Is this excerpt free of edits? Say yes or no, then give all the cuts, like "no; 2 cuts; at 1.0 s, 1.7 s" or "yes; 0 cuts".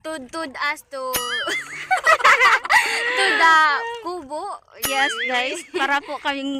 yes; 0 cuts